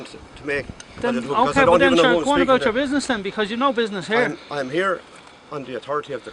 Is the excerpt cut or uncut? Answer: cut